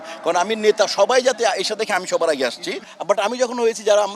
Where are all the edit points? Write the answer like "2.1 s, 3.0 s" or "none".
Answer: 2.9 s